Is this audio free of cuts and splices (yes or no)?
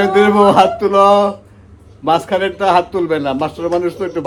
yes